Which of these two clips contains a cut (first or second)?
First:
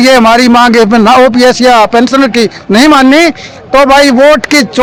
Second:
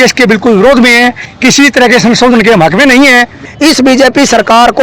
second